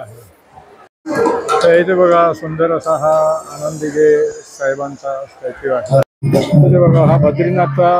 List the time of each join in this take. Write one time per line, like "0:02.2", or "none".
0:01.0
0:06.1